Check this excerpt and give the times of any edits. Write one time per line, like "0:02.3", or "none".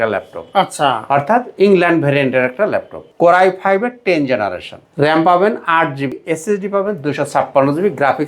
0:03.0
0:04.8
0:06.2